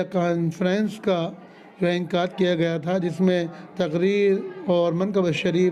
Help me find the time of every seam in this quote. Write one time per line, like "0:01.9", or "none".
none